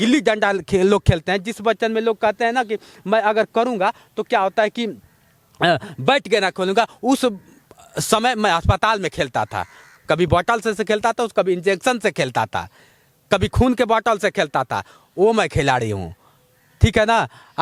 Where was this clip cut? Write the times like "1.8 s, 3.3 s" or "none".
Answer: none